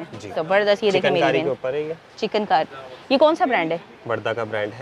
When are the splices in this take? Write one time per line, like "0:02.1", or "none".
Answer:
none